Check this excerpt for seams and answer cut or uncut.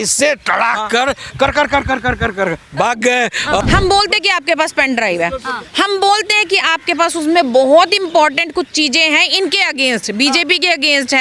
cut